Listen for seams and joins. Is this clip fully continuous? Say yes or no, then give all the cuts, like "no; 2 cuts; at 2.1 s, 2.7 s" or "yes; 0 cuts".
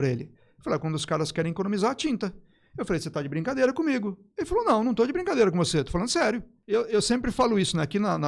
no; 1 cut; at 6.5 s